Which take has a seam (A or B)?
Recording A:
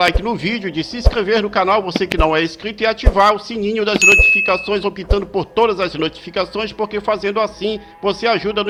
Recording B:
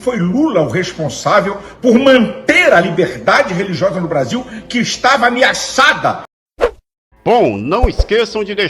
B